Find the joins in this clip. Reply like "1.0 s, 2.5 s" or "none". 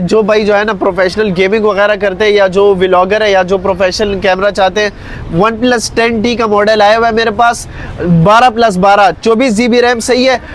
none

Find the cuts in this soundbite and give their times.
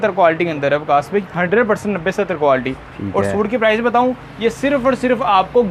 none

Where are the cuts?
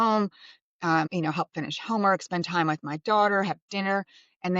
1.1 s

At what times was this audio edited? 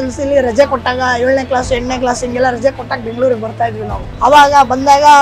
4.0 s

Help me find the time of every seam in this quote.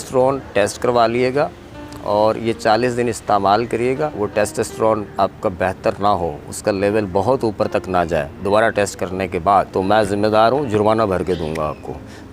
4.1 s, 9.7 s

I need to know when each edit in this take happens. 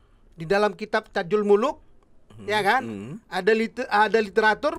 none

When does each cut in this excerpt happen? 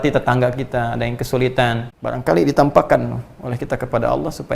1.9 s

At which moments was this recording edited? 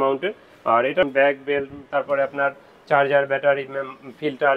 1.1 s

